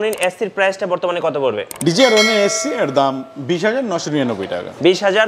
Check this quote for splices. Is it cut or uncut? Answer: uncut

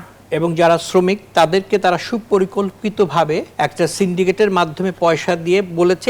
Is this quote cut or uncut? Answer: cut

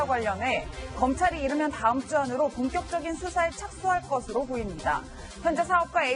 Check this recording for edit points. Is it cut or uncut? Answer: uncut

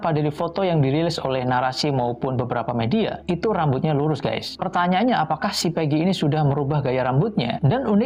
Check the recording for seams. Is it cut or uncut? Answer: uncut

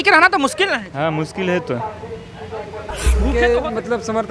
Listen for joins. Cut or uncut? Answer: cut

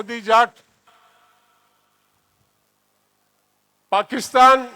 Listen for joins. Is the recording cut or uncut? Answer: uncut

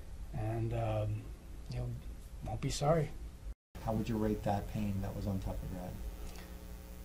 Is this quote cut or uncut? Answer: cut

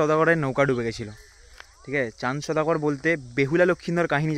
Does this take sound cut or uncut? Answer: uncut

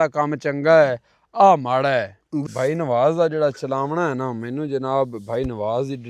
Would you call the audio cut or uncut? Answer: cut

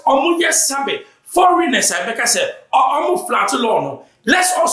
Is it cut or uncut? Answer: uncut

